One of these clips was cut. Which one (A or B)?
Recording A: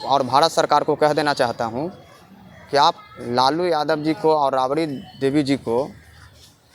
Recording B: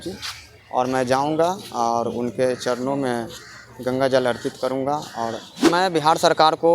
B